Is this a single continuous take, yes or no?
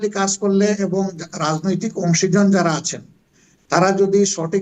yes